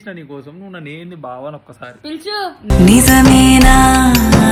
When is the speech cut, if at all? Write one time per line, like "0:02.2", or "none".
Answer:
none